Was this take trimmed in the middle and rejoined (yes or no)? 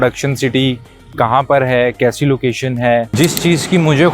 yes